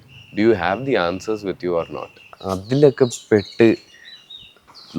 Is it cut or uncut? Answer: cut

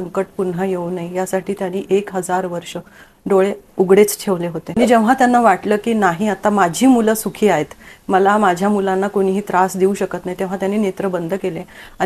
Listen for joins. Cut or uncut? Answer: cut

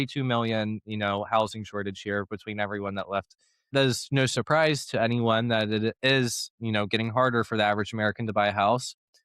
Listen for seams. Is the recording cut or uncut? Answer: cut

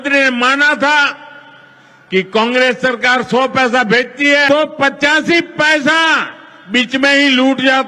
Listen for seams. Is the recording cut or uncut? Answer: cut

